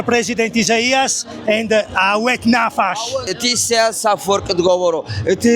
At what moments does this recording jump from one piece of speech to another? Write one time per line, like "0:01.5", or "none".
0:03.3